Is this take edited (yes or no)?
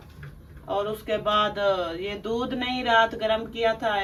no